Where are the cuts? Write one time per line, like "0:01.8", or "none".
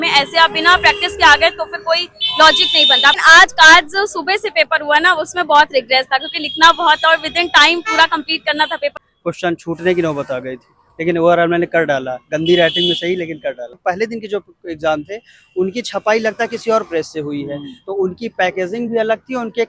0:03.2
0:09.0
0:13.8